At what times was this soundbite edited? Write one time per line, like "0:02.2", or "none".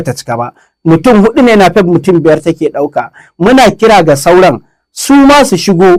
none

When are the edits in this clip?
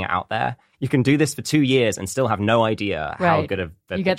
none

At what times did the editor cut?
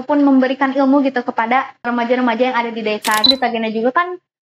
0:01.9
0:03.3

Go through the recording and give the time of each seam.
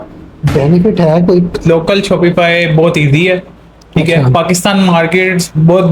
0:01.6

